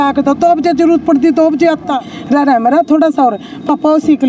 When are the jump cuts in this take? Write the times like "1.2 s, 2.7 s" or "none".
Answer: 2.1 s